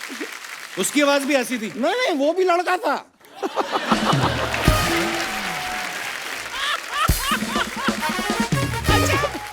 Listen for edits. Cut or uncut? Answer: uncut